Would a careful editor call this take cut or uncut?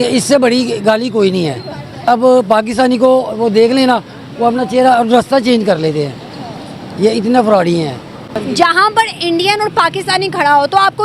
uncut